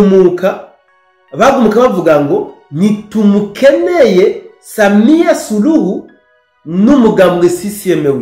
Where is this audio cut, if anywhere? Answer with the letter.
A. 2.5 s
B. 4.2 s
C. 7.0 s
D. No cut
D